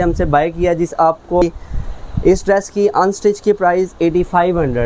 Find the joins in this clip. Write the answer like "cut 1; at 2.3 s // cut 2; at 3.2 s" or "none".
cut 1; at 1.4 s